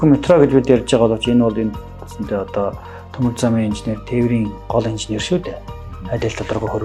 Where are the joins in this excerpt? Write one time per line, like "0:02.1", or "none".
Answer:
none